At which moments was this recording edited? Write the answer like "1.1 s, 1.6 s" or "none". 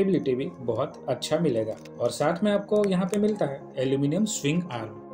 none